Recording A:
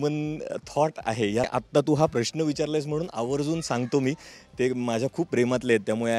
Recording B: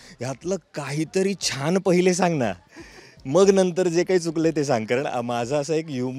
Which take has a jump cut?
A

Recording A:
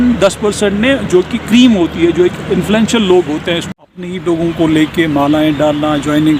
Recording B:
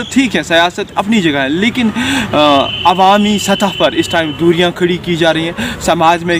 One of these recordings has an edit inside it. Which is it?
A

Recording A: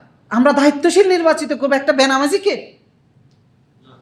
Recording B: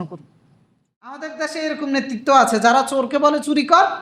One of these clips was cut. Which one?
B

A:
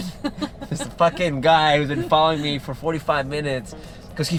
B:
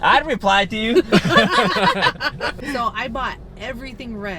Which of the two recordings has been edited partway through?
B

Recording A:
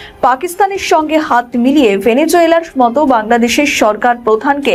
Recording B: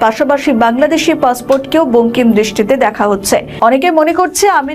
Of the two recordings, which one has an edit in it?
B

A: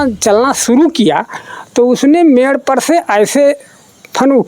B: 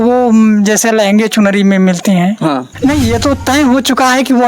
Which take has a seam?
B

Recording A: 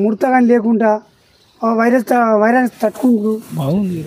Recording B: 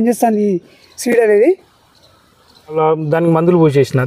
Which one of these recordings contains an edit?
B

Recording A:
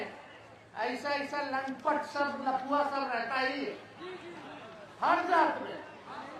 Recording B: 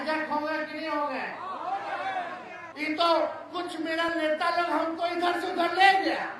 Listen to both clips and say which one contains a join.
B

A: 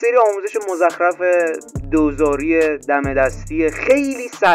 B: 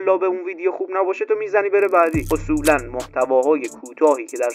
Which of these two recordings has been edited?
B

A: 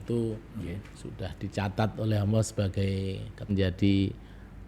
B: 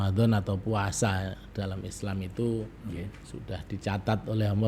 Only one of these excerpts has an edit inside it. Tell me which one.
A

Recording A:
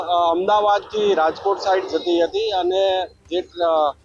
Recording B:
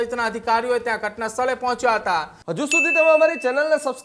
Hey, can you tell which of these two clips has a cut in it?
B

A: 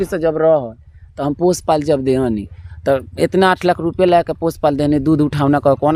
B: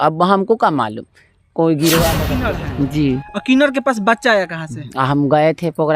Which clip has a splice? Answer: B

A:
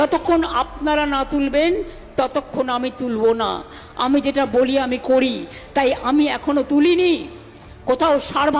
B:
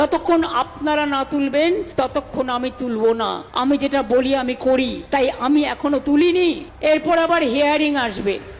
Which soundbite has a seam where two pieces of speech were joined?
B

